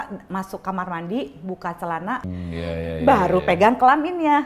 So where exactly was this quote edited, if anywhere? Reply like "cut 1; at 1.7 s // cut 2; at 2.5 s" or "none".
cut 1; at 2.3 s